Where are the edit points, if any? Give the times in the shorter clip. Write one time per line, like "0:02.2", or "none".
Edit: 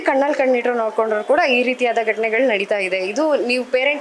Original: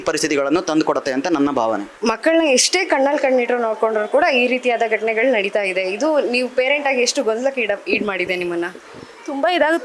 none